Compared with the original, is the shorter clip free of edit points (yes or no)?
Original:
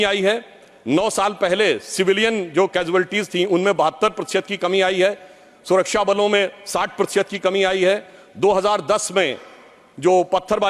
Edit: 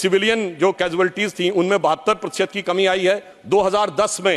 no